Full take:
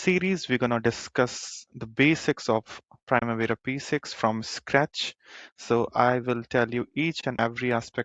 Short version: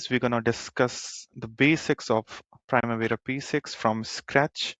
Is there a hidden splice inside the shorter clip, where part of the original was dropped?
no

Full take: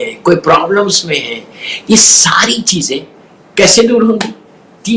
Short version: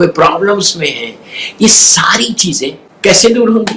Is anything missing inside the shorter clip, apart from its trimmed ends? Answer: yes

